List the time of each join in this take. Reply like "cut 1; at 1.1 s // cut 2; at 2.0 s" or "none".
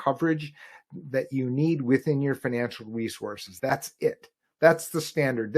cut 1; at 3.5 s